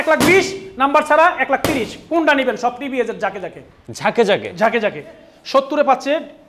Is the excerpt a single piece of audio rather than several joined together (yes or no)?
no